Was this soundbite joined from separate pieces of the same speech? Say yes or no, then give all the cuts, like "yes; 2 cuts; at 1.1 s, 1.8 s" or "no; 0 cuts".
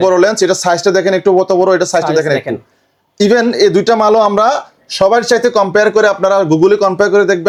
no; 0 cuts